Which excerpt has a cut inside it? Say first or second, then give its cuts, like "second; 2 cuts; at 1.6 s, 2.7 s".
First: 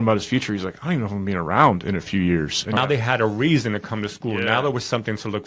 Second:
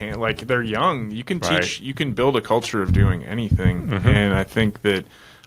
first; 1 cut; at 2.8 s